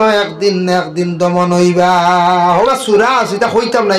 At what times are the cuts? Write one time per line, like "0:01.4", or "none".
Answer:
0:02.7